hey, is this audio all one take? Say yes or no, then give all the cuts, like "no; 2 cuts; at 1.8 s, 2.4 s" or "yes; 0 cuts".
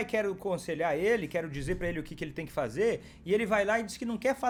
yes; 0 cuts